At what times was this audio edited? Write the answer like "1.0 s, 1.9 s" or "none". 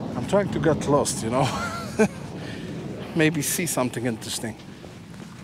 none